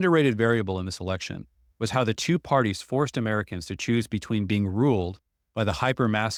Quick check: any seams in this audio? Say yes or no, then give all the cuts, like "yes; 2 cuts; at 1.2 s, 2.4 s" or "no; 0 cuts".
no; 0 cuts